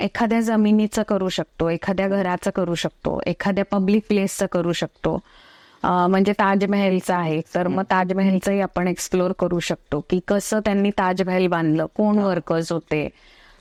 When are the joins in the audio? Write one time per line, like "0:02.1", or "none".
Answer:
none